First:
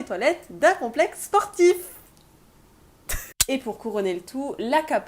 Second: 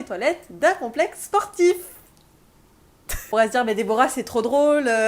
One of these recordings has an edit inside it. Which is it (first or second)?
first